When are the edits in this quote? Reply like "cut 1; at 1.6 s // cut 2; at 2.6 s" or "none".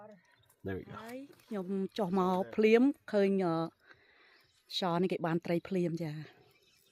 cut 1; at 0.9 s